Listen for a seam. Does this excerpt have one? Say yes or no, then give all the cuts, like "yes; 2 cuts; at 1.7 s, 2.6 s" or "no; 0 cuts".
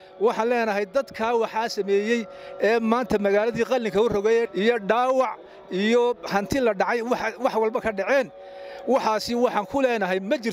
no; 0 cuts